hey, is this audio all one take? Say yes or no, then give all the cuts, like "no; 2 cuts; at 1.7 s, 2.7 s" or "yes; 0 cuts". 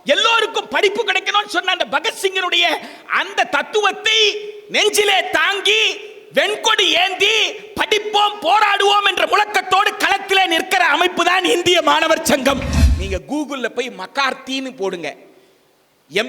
no; 1 cut; at 12.8 s